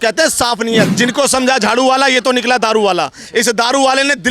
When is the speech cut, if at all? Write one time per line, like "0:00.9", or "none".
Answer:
0:00.9